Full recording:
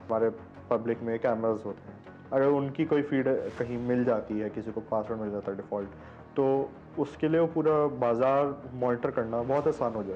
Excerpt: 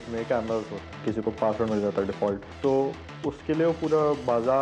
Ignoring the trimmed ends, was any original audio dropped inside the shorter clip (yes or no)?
yes